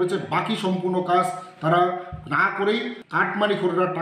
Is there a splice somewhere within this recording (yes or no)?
yes